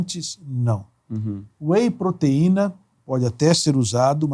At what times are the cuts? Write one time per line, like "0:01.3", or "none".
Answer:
none